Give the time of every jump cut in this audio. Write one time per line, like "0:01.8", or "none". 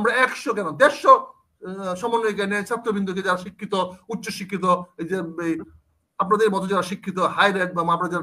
none